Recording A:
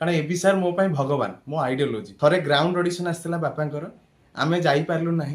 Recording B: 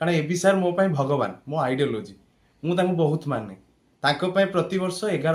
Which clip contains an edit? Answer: A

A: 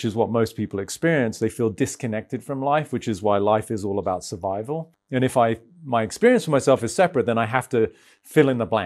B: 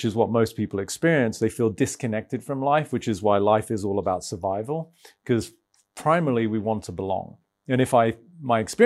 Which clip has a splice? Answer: A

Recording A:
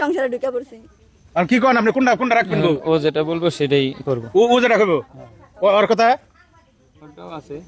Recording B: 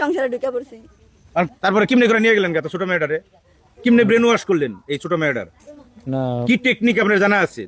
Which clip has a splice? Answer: B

